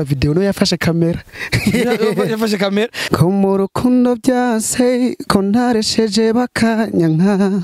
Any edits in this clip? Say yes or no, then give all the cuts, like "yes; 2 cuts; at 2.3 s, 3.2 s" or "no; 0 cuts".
yes; 1 cut; at 3.0 s